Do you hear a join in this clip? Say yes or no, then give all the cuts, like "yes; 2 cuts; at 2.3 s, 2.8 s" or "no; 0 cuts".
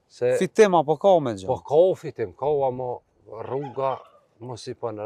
no; 0 cuts